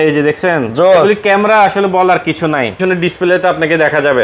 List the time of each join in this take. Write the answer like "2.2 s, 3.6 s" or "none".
2.8 s